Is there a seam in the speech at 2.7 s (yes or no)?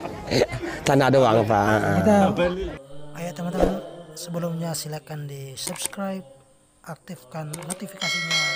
yes